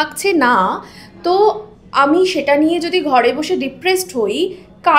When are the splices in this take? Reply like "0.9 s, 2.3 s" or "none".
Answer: none